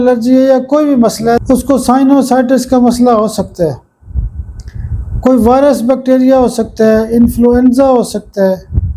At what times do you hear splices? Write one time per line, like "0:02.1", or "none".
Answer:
none